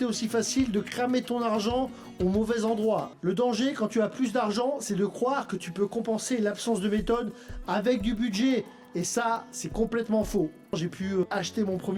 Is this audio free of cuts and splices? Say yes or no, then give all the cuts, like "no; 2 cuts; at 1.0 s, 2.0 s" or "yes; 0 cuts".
no; 2 cuts; at 3.1 s, 10.8 s